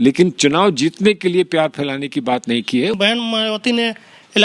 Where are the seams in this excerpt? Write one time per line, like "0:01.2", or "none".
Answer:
0:02.9